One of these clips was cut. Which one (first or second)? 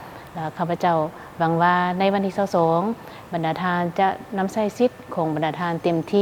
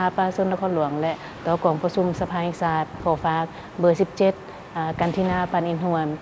second